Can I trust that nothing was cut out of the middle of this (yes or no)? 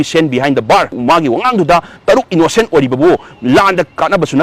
no